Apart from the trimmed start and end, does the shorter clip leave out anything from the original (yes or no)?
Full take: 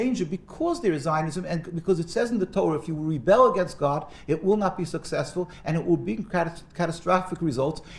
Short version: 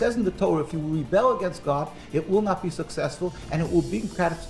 no